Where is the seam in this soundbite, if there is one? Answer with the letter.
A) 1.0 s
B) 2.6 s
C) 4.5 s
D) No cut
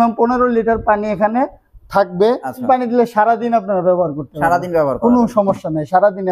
B